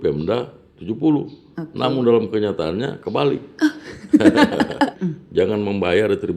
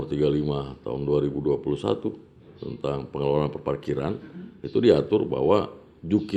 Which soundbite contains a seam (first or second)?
first